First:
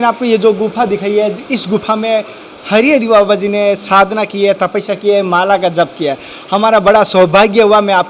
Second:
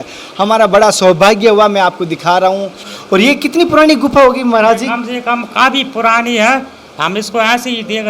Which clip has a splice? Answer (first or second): second